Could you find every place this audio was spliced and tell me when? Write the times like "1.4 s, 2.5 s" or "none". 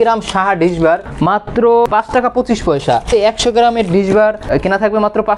1.1 s, 1.9 s, 3.1 s, 4.5 s